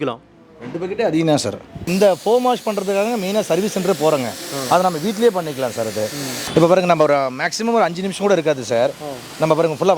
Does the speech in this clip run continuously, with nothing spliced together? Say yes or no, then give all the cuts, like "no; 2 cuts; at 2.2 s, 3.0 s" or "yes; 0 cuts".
no; 2 cuts; at 1.9 s, 6.4 s